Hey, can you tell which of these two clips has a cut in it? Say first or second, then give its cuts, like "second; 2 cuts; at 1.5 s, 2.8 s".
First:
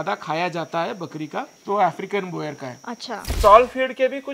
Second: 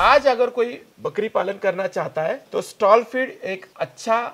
first; 1 cut; at 3.3 s